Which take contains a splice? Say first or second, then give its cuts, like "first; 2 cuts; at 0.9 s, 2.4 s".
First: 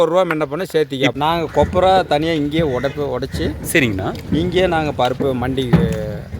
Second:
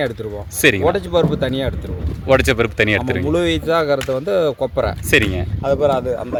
first; 1 cut; at 1.1 s